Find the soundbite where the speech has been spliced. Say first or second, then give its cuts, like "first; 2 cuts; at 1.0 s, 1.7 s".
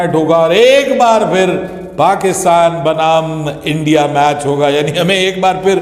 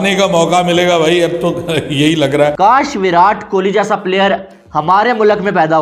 second; 1 cut; at 2.5 s